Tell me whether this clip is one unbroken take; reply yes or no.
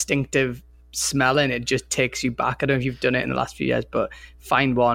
yes